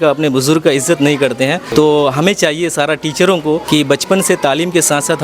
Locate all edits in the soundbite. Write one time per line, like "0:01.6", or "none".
0:01.6
0:03.6